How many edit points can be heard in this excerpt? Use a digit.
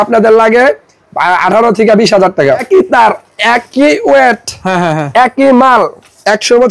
1